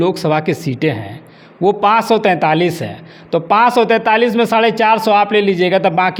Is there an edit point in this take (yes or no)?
no